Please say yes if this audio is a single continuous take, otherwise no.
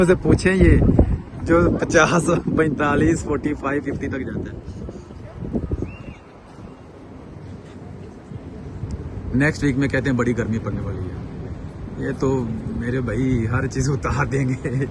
yes